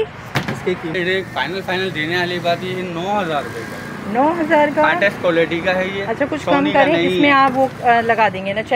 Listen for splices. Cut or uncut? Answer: cut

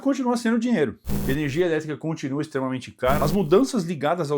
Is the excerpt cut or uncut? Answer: cut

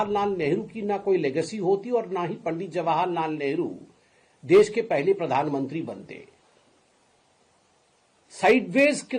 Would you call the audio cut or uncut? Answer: uncut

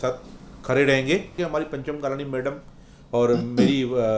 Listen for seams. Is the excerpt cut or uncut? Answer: cut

